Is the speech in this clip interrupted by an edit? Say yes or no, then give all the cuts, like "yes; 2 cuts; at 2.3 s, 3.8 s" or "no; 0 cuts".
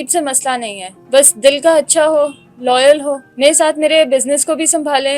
yes; 1 cut; at 3.3 s